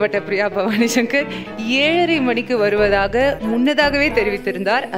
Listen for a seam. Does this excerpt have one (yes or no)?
no